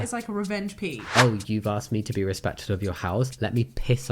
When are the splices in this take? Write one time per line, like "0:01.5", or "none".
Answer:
0:01.1